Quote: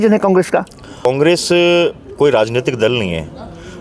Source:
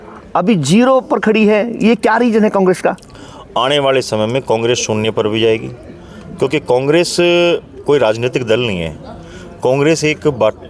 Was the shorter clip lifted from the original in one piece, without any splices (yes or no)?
no